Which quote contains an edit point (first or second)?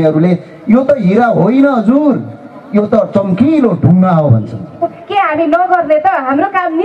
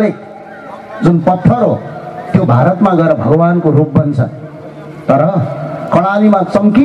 first